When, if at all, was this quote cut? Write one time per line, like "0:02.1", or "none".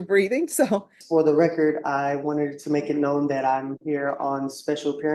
0:01.0